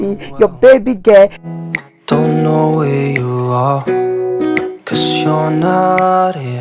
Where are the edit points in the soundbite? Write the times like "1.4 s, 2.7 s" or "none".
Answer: 1.4 s